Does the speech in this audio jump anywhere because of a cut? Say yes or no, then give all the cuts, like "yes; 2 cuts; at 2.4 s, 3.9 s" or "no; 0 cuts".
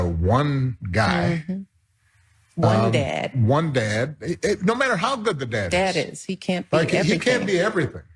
yes; 1 cut; at 5.9 s